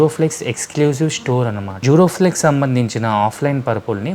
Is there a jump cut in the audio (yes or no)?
yes